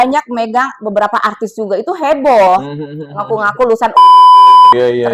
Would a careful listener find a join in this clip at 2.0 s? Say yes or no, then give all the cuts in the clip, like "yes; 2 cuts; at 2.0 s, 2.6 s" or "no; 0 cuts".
no; 0 cuts